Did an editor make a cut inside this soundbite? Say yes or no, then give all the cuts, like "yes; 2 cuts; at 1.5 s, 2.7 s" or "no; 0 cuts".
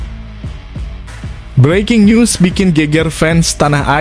yes; 1 cut; at 1.5 s